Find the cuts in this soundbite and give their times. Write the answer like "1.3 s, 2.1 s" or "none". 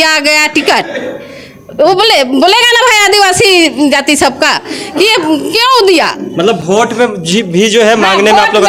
none